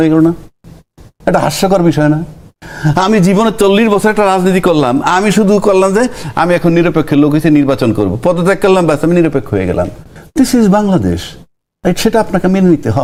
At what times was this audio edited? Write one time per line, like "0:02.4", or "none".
none